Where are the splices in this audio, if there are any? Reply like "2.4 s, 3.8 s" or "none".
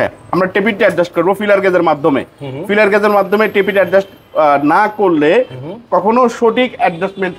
none